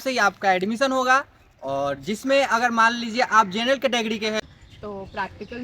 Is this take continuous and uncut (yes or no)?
no